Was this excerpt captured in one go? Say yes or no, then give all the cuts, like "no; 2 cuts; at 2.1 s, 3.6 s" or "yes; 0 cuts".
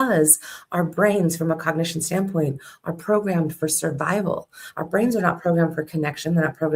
yes; 0 cuts